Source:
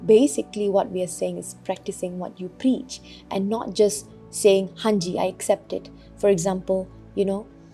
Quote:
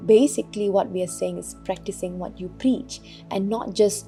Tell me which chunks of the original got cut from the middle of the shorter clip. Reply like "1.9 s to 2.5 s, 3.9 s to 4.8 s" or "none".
none